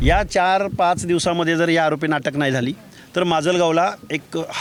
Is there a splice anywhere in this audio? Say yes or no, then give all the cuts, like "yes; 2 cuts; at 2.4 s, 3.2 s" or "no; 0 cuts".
no; 0 cuts